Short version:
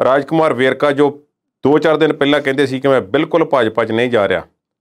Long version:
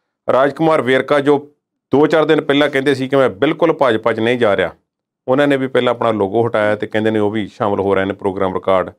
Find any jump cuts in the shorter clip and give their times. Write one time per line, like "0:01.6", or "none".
none